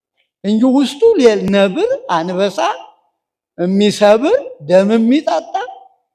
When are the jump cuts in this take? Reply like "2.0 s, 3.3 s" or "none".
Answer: none